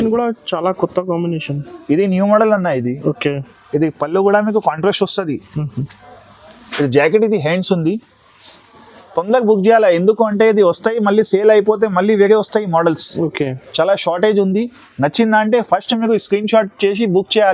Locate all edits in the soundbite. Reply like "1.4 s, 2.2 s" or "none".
none